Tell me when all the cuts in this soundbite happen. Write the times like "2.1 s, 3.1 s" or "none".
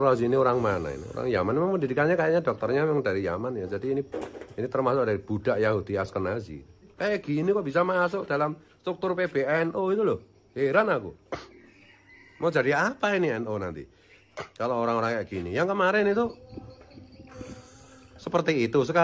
6.9 s, 16.8 s, 18.1 s